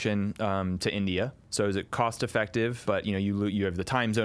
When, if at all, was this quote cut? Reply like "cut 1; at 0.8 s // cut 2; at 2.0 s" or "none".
cut 1; at 1.4 s // cut 2; at 2.8 s